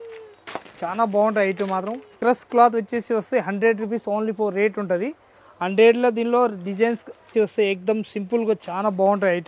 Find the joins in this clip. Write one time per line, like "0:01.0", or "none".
0:02.1
0:07.3